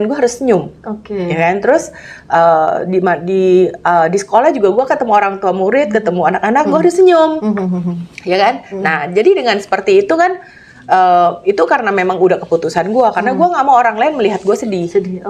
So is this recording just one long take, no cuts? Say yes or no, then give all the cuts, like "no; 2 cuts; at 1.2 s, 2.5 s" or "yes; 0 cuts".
yes; 0 cuts